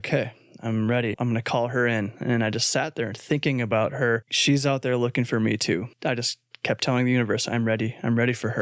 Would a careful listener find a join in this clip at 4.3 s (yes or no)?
yes